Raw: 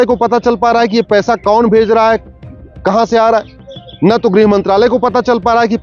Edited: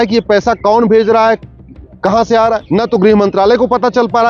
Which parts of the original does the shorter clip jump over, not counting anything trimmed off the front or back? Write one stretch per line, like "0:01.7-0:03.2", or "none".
0:03.5-0:04.0